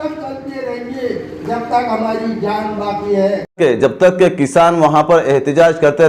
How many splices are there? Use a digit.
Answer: 1